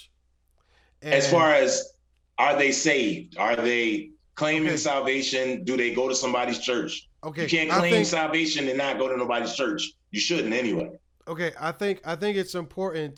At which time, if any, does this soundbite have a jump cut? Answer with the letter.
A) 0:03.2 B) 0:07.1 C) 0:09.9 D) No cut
D